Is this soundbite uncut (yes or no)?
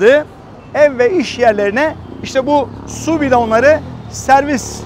yes